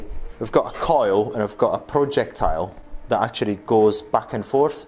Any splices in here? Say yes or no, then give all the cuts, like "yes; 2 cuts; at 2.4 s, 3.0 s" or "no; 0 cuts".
no; 0 cuts